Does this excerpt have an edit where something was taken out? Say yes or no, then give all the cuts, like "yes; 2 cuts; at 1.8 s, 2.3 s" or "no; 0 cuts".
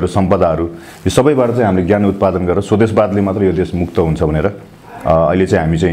no; 0 cuts